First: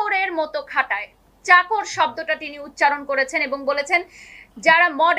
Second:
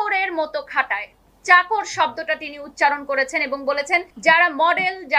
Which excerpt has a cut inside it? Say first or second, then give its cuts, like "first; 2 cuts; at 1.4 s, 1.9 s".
second; 1 cut; at 4.1 s